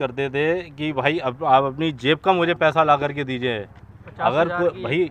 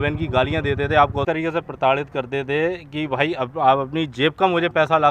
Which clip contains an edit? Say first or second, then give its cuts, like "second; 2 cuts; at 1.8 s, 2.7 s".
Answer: second; 1 cut; at 1.2 s